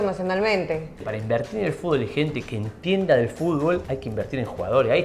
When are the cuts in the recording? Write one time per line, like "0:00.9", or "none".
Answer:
0:01.1
0:03.9